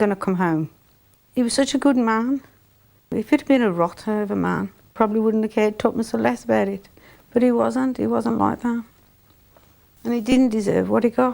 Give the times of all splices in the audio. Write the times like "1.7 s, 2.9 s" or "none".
1.1 s, 3.1 s, 4.9 s